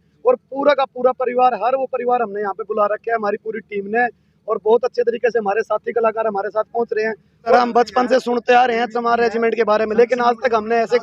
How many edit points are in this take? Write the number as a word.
one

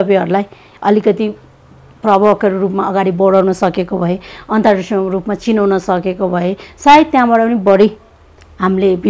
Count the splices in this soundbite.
zero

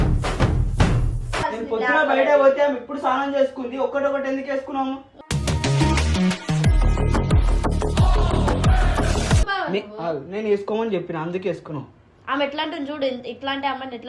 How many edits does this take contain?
two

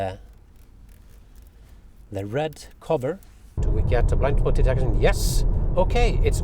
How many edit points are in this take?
one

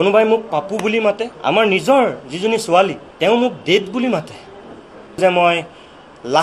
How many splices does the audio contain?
three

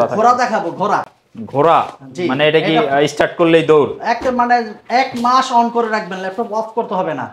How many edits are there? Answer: zero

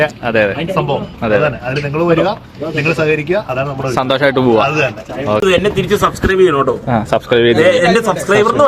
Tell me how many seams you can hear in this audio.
one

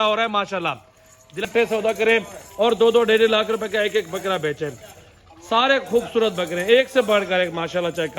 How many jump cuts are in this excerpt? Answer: one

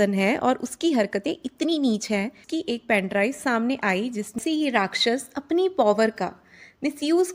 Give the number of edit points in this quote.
two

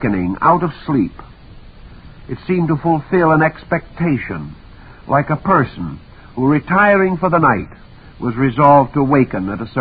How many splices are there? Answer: one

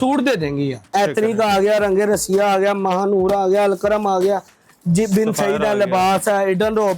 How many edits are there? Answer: one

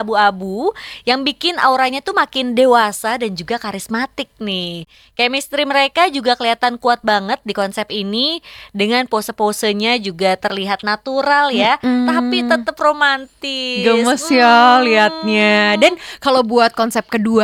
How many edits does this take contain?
zero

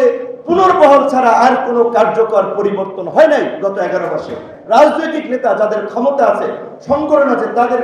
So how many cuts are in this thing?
zero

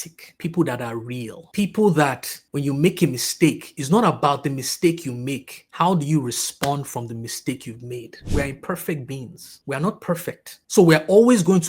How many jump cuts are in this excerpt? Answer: one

